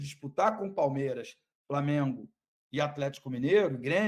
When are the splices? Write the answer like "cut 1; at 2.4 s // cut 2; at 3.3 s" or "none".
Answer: none